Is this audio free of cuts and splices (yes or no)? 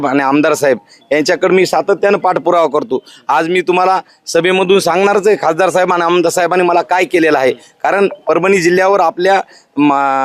yes